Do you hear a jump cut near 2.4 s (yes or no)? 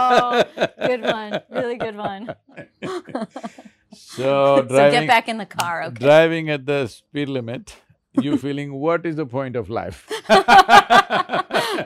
yes